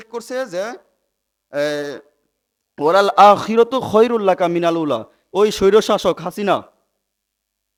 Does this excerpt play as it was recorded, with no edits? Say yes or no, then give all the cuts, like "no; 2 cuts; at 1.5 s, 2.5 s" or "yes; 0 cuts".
yes; 0 cuts